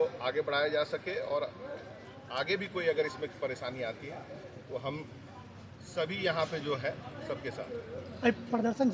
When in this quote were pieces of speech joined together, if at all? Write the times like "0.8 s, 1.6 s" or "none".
none